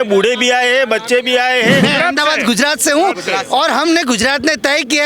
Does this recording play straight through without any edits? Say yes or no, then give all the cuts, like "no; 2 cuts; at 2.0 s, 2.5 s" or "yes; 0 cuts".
no; 1 cut; at 1.8 s